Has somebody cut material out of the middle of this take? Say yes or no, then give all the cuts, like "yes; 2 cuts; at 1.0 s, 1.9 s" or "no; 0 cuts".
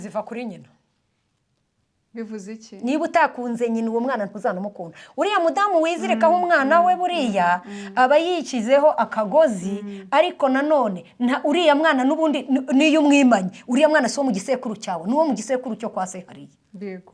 no; 0 cuts